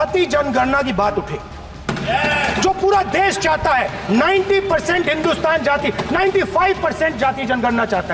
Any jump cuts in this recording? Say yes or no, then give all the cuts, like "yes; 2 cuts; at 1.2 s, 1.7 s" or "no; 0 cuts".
no; 0 cuts